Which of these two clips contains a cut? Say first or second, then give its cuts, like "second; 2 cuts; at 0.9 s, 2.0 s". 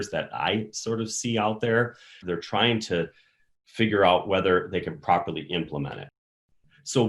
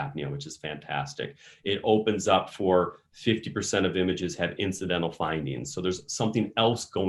first; 2 cuts; at 2.2 s, 6.1 s